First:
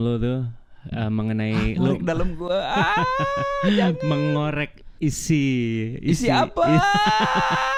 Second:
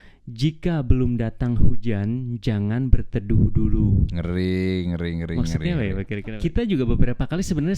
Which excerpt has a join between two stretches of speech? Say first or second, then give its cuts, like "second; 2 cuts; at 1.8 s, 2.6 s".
second; 1 cut; at 6.2 s